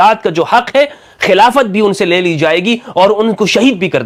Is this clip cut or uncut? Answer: uncut